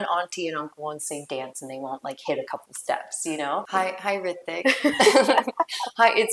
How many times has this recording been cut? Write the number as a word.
one